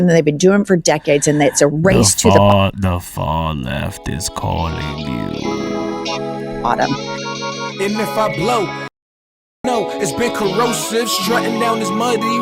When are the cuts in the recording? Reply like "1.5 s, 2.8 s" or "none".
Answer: 7.2 s